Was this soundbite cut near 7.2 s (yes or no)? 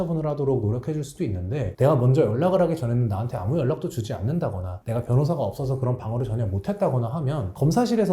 no